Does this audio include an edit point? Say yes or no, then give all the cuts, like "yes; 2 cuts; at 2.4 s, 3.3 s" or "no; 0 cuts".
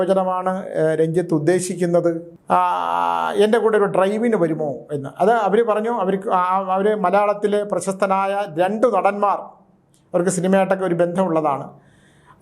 yes; 1 cut; at 2.3 s